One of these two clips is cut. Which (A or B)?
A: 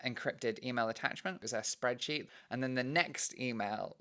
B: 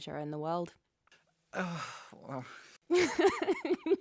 A